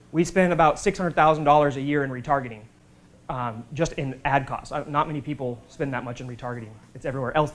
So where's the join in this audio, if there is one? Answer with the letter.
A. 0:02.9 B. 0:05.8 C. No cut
C